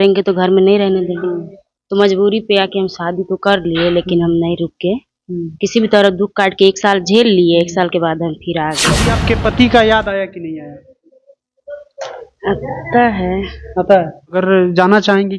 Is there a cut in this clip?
yes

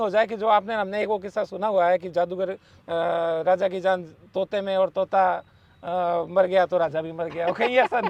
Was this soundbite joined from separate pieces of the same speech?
no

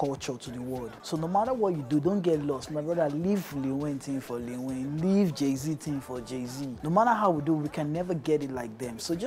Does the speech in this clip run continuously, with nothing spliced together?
no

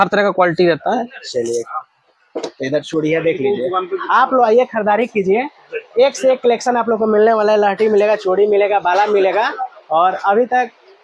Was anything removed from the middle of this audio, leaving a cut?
yes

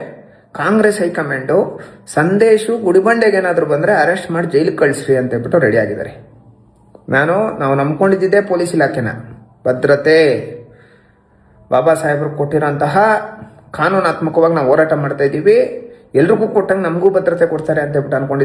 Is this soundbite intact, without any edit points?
yes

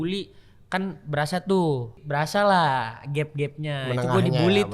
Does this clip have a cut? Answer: yes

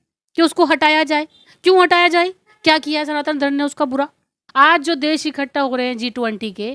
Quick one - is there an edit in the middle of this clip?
yes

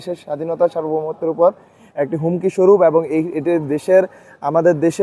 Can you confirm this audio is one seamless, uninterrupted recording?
yes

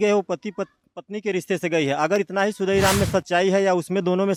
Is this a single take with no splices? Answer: yes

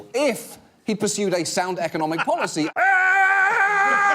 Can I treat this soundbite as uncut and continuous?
no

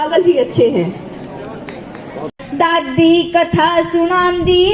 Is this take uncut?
no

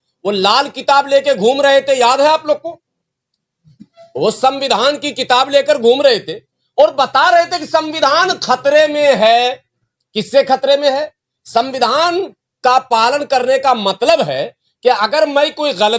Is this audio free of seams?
yes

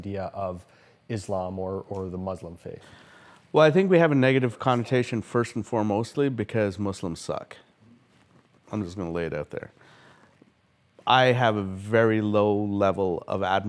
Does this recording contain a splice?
no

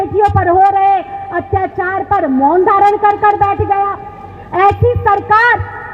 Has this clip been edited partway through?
no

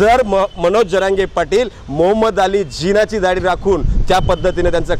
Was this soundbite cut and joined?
no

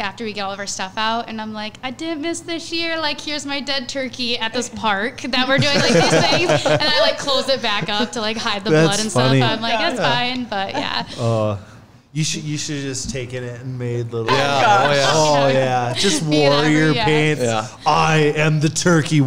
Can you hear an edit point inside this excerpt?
no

